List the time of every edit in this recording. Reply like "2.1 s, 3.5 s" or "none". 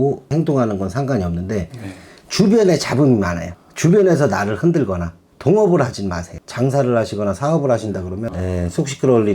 8.3 s